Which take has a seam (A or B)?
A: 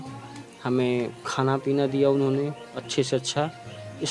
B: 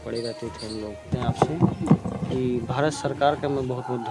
B